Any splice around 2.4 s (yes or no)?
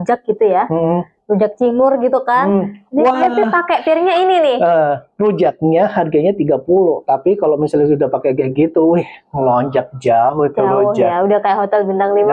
no